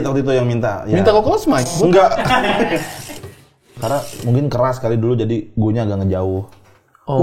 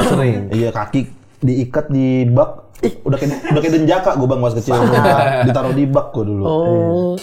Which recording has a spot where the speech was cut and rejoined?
first; 1 cut; at 3.3 s

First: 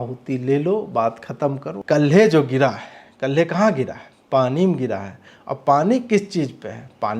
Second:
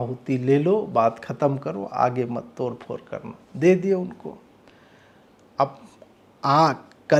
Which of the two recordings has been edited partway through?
first; 1 cut; at 1.7 s

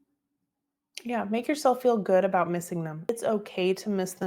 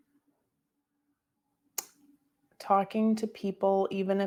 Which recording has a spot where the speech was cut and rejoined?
first; 1 cut; at 3.1 s

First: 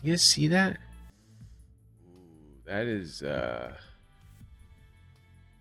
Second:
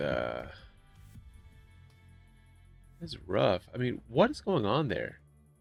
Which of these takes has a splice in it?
first; 1 cut; at 1.0 s

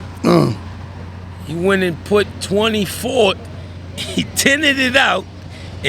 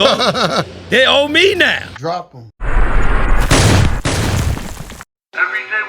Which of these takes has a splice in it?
second; 1 cut; at 1.9 s

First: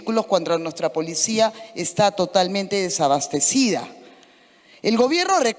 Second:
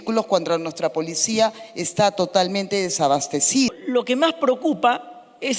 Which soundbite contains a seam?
second; 1 cut; at 3.7 s

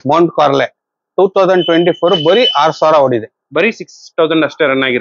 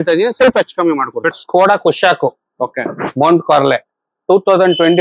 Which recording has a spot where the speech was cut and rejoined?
second; 1 cut; at 1.3 s

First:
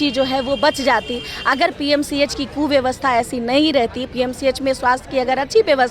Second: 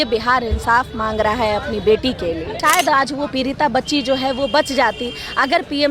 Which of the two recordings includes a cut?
second; 1 cut; at 2.5 s

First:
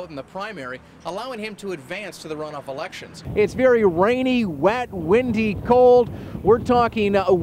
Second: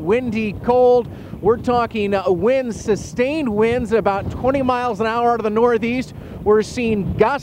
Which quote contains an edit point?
first; 1 cut; at 3.2 s

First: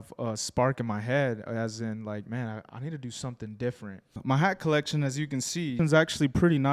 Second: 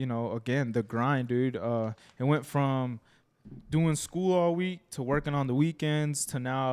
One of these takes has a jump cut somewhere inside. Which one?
first; 2 cuts; at 4.2 s, 5.8 s

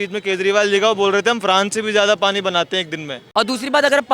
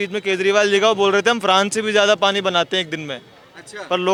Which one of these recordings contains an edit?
first; 1 cut; at 3.2 s

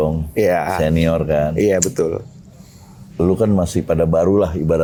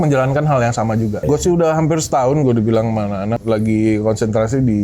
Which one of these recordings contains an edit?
second; 2 cuts; at 1.2 s, 3.4 s

